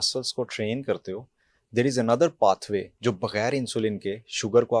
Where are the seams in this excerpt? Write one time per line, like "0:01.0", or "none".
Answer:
0:02.9